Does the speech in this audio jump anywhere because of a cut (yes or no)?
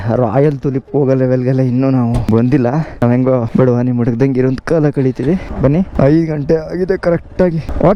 no